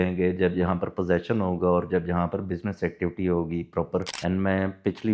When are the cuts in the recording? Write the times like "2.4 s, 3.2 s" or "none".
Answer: 4.1 s